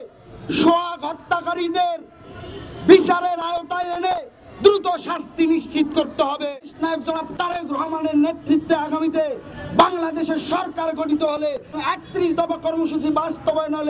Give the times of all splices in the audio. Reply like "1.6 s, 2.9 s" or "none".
6.6 s, 11.8 s